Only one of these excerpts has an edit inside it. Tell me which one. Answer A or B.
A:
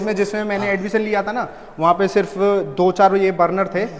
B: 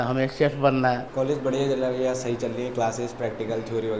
B